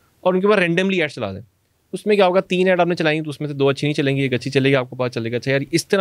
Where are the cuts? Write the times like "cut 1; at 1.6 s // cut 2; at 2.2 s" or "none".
none

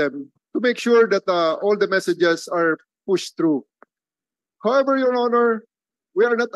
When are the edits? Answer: none

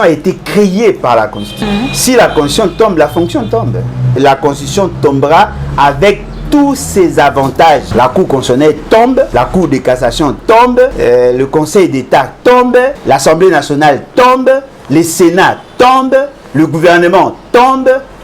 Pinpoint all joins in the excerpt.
cut 1; at 1.6 s // cut 2; at 4.1 s // cut 3; at 7.9 s // cut 4; at 9.3 s // cut 5; at 11.0 s // cut 6; at 13.0 s

